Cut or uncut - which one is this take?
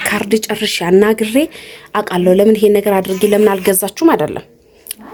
uncut